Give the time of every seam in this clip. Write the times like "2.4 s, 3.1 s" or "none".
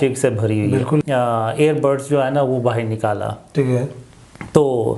1.0 s